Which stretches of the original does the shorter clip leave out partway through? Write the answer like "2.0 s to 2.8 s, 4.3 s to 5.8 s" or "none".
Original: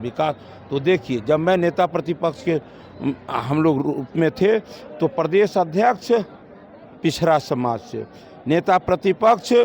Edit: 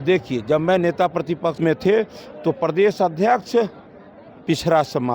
2.3 s to 4.1 s